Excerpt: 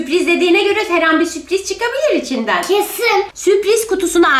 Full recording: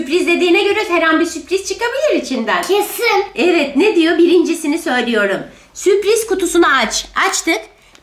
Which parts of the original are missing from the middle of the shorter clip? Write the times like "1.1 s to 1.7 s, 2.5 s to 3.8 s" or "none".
3.3 s to 5.7 s